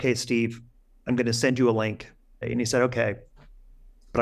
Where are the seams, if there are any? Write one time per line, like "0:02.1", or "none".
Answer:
0:02.4